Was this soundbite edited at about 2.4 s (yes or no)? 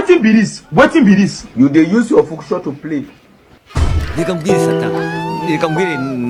no